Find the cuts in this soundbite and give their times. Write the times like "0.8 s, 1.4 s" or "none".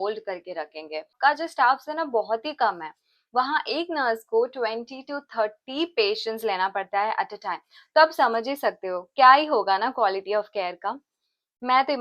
1.1 s